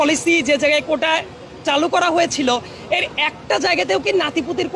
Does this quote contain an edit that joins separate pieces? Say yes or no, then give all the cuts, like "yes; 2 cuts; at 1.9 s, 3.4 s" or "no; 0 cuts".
no; 0 cuts